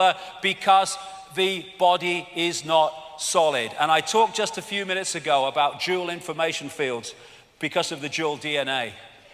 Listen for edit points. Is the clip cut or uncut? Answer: cut